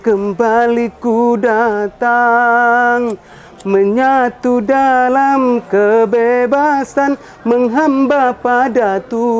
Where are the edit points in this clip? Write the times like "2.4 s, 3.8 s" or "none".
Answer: none

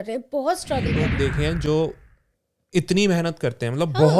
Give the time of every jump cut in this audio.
1.1 s

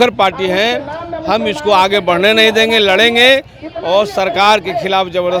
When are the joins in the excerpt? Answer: none

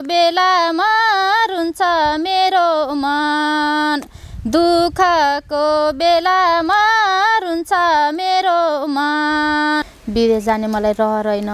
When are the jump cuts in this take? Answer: 10.0 s

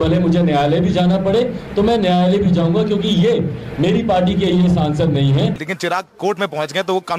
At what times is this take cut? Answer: 5.7 s

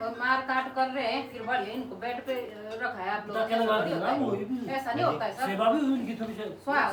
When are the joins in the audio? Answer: none

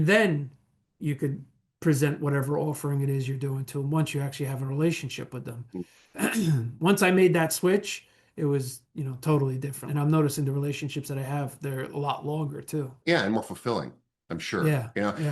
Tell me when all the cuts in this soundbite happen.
9.8 s, 12.9 s

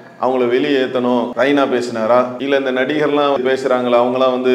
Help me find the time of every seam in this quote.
1.3 s, 2.4 s, 3.4 s

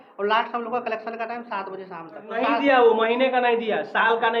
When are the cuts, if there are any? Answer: 2.3 s

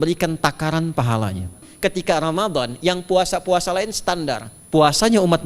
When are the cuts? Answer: 1.7 s, 4.5 s

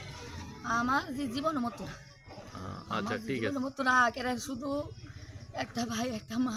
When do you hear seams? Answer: none

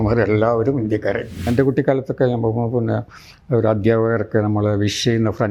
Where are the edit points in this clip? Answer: 1.5 s

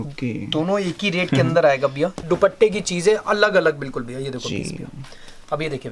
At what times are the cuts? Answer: 2.2 s

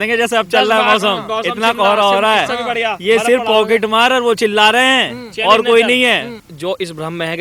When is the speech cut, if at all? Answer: 6.5 s

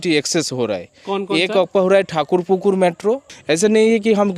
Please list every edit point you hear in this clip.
3.3 s

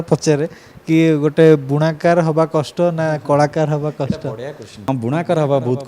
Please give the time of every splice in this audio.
4.9 s

